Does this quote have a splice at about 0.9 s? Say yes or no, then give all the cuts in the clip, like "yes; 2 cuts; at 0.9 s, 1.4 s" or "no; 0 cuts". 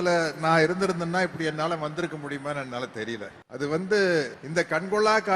no; 2 cuts; at 3.4 s, 4.4 s